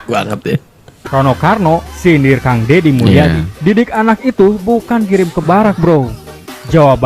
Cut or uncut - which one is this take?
cut